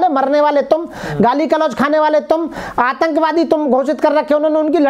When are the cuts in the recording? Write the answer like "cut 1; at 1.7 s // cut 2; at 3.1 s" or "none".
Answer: none